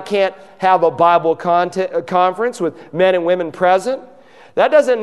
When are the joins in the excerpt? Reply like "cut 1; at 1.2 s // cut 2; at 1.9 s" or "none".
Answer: none